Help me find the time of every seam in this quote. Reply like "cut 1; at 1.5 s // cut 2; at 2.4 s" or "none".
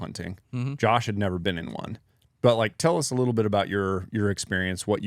none